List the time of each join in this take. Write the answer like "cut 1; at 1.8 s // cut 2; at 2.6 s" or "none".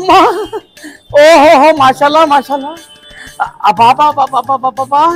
none